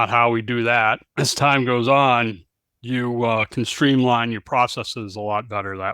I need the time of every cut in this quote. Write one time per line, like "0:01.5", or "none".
0:01.1